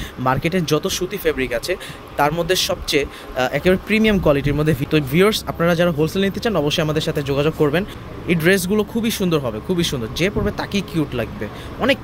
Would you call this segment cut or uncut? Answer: cut